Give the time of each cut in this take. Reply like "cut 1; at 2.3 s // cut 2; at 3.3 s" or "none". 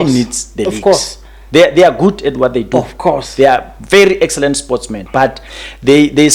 none